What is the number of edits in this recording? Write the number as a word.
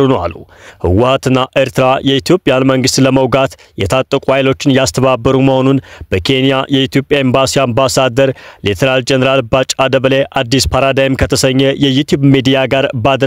zero